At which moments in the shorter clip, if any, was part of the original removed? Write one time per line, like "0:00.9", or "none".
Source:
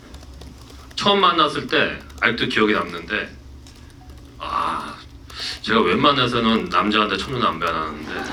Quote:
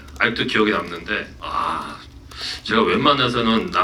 0:01.3